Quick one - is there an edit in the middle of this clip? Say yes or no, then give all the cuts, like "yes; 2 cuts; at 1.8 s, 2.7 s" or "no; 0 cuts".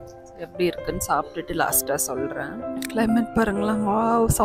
yes; 1 cut; at 2.5 s